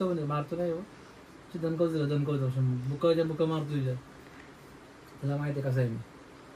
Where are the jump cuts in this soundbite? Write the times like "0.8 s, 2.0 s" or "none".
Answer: none

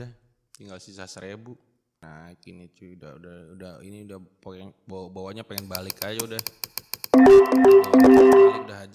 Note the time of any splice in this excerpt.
2.0 s

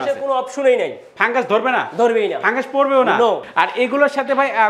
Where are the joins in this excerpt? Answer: 3.5 s

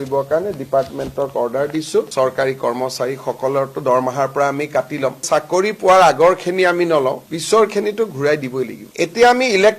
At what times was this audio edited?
5.2 s, 8.8 s

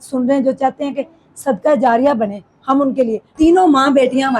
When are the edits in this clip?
3.2 s

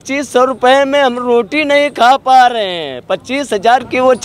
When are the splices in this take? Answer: none

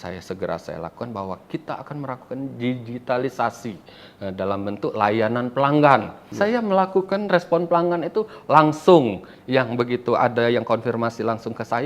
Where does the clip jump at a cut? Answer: 6.2 s

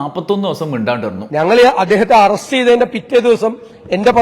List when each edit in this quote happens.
1.2 s

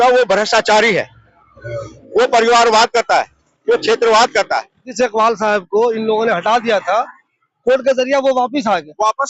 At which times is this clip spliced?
4.9 s

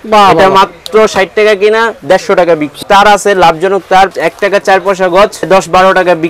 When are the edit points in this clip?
2.7 s, 4.2 s, 5.5 s

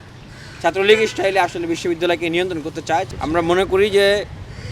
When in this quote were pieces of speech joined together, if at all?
3.1 s

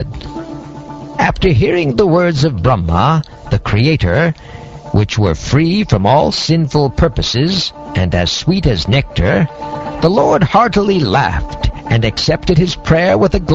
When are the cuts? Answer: 7.9 s

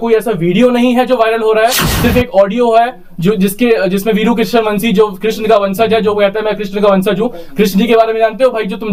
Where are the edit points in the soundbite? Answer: none

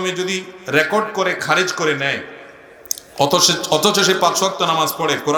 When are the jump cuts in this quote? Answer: none

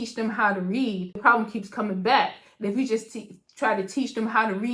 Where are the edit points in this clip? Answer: 1.2 s

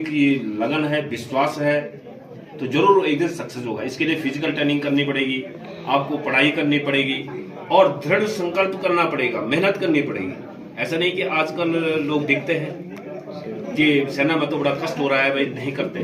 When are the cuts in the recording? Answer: none

